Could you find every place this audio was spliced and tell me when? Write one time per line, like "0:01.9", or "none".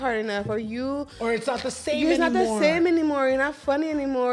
none